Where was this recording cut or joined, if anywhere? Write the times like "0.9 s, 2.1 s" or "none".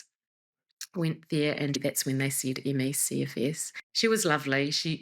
1.8 s